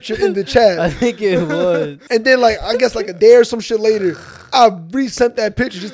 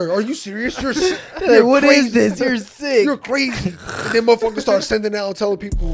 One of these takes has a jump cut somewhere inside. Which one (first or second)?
first